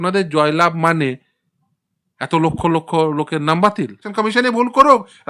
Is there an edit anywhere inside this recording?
yes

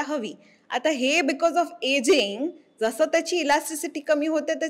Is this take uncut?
yes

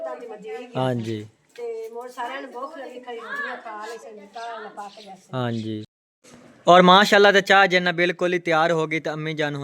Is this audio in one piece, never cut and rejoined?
no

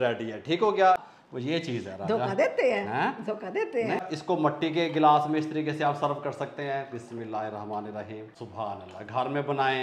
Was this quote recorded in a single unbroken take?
no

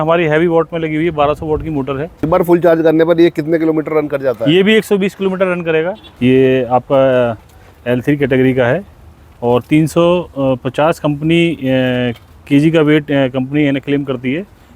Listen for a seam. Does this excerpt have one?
yes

